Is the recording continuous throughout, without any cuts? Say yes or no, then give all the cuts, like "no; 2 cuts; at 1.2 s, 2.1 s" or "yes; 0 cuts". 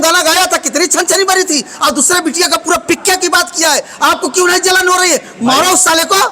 yes; 0 cuts